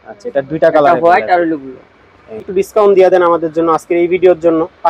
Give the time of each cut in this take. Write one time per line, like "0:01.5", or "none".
0:02.5

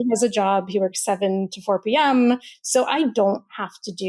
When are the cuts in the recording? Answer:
0:02.5

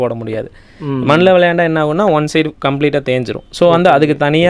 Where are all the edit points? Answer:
none

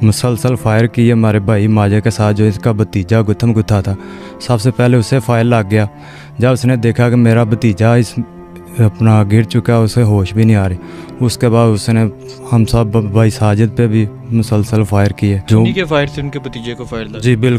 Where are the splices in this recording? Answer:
0:15.5

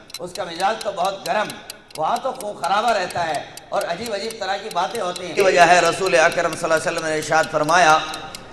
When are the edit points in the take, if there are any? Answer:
0:05.4

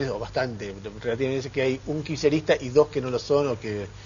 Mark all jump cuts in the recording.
0:00.9

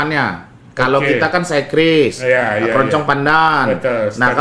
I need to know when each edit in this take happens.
none

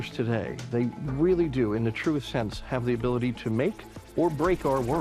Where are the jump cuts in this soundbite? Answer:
none

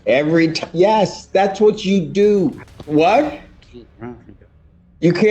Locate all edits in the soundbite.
0:02.7

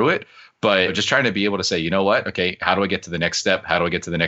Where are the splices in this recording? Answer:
0:01.0

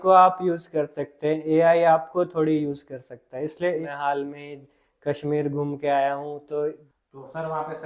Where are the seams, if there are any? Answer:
0:03.6
0:06.8

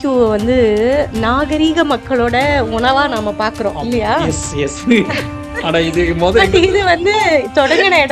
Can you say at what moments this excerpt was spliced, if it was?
0:01.1

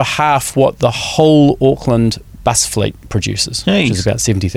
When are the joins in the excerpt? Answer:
none

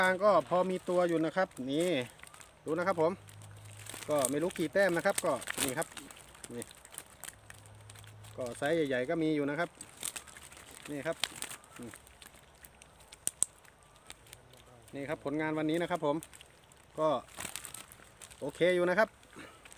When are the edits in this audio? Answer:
none

